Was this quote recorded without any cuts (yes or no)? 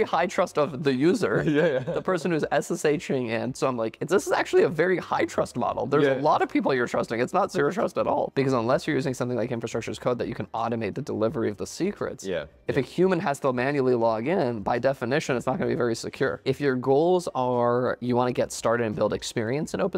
no